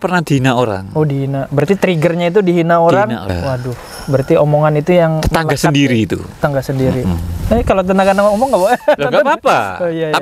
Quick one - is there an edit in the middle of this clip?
yes; 1 cut; at 3.3 s

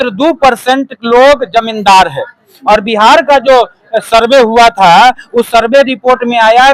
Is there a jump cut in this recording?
no; 0 cuts

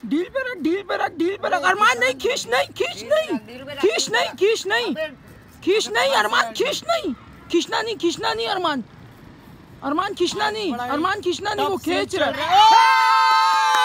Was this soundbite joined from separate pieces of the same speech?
no; 0 cuts

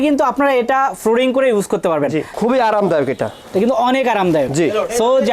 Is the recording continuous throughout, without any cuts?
no; 1 cut; at 2.3 s

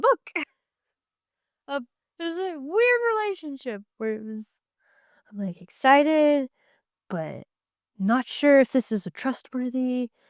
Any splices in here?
no; 0 cuts

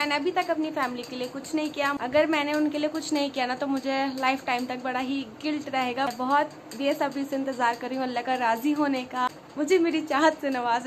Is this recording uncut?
no; 3 cuts; at 2.0 s, 6.1 s, 9.4 s

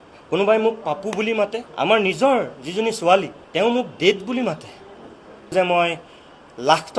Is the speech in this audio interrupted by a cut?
yes; 3 cuts; at 1.6 s, 3.4 s, 5.5 s

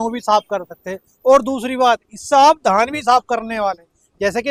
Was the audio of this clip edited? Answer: no; 0 cuts

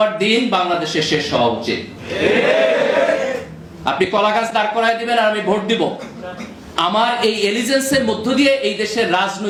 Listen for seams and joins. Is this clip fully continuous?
yes; 0 cuts

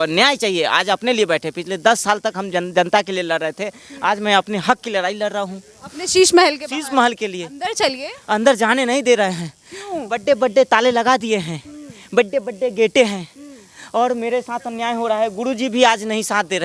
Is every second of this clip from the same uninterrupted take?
yes; 0 cuts

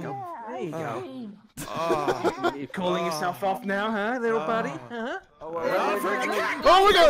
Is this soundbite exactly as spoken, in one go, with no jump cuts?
yes; 0 cuts

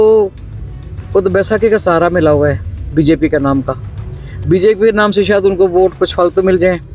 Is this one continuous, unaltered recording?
yes; 0 cuts

